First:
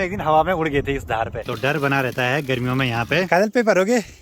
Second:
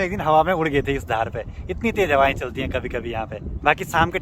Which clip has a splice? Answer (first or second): first